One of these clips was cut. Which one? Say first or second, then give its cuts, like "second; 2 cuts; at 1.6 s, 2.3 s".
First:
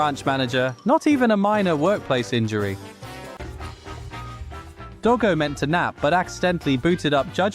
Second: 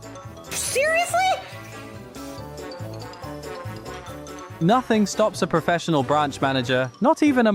first; 1 cut; at 3.4 s